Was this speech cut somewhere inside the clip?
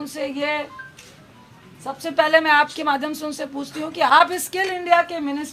yes; 1 cut; at 4.1 s

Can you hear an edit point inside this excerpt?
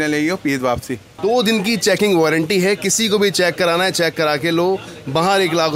yes; 1 cut; at 1.1 s

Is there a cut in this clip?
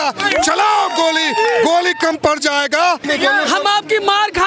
yes; 1 cut; at 3.0 s

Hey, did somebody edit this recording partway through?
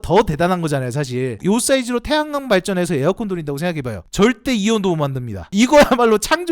yes; 1 cut; at 5.5 s

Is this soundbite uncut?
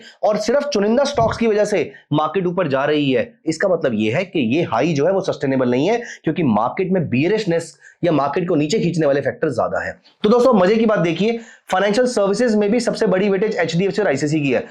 yes; 0 cuts

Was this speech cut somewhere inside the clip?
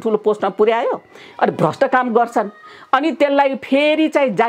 no; 0 cuts

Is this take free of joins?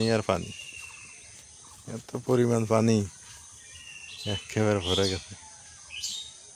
yes; 0 cuts

